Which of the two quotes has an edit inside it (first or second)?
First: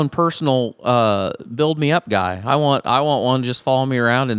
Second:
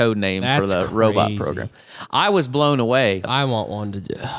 second